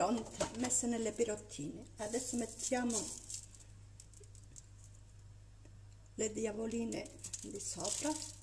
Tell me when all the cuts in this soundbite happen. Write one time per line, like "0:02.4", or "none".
none